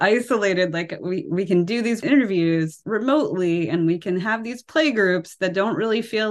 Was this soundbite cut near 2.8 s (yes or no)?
yes